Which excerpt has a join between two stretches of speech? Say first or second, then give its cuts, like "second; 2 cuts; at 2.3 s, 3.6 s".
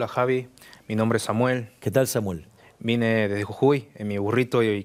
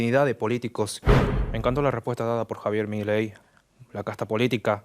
second; 2 cuts; at 1.0 s, 3.5 s